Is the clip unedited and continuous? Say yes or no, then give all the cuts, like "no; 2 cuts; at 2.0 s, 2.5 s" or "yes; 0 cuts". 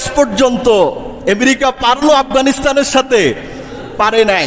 yes; 0 cuts